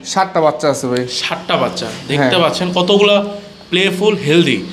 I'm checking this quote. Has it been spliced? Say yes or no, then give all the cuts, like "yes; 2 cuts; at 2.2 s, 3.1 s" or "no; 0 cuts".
no; 0 cuts